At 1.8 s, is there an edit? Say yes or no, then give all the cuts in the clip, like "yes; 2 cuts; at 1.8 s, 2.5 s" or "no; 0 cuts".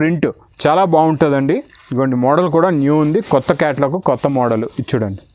no; 0 cuts